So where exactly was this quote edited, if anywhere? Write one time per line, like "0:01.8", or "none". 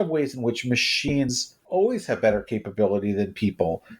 0:01.6